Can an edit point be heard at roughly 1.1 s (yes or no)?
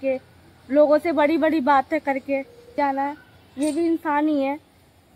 no